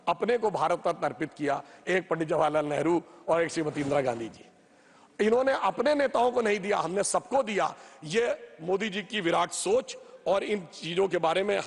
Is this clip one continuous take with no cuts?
yes; 0 cuts

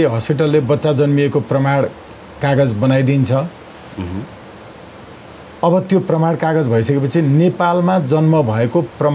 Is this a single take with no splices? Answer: yes; 0 cuts

